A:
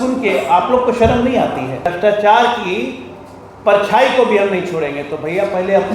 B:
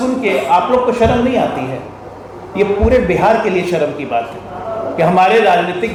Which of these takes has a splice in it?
A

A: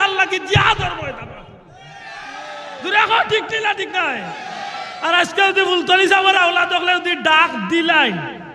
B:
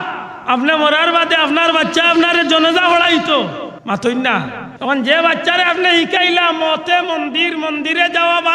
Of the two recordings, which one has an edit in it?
B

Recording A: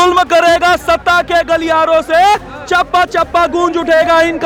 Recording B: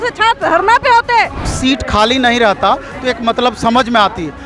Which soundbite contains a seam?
B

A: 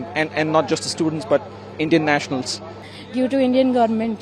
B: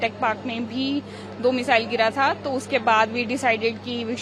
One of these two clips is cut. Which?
A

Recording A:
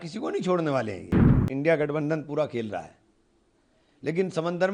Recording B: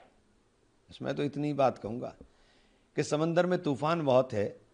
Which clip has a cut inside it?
A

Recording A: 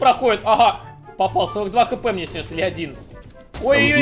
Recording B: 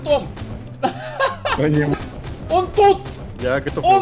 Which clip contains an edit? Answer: B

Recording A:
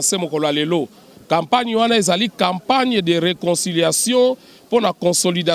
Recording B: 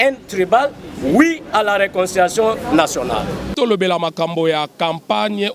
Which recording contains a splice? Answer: B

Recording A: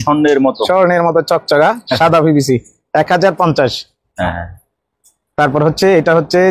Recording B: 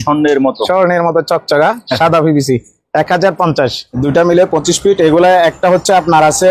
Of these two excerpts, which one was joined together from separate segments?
B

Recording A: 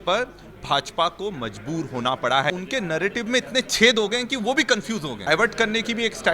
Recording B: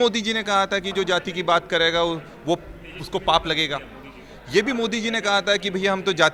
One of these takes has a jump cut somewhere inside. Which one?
A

